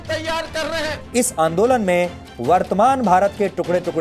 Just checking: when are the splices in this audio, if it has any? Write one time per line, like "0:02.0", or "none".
0:01.0